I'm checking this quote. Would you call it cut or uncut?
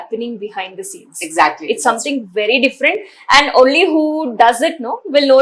uncut